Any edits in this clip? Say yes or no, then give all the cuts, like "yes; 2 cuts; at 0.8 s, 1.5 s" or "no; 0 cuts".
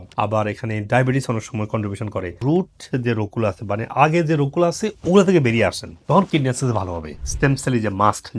yes; 1 cut; at 7.1 s